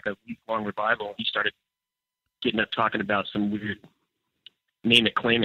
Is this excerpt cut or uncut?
uncut